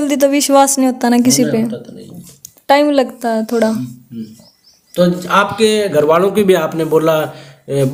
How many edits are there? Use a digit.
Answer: 0